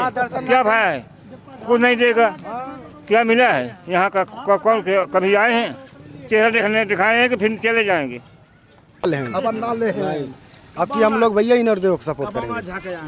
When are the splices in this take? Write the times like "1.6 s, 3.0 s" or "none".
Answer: 9.1 s